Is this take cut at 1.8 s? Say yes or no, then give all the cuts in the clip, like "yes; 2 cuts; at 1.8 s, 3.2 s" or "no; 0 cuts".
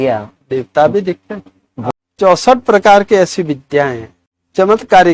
yes; 1 cut; at 1.8 s